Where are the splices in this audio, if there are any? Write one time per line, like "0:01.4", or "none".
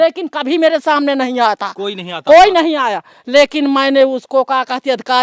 none